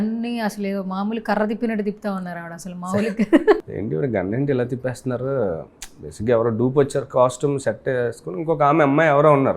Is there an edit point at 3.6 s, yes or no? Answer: yes